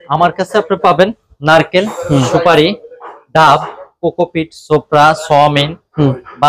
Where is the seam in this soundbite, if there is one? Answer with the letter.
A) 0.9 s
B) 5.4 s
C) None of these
C